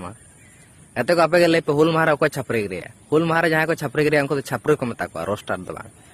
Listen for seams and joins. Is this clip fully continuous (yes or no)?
yes